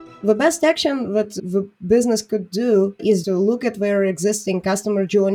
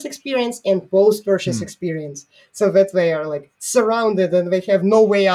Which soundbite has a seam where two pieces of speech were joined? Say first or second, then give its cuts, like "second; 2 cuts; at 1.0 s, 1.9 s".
first; 2 cuts; at 1.3 s, 3.1 s